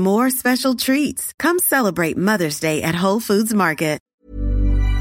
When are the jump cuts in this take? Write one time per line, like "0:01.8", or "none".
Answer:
0:04.1